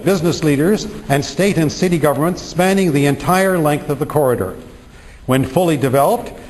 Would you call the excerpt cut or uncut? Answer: cut